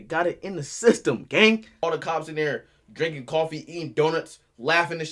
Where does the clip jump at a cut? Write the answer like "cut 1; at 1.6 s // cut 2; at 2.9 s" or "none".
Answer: cut 1; at 1.8 s